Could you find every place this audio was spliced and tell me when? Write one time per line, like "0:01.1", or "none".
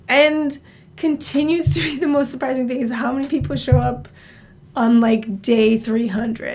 none